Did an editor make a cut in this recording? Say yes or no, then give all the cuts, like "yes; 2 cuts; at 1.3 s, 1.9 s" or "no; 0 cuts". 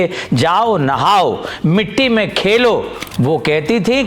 yes; 1 cut; at 3.0 s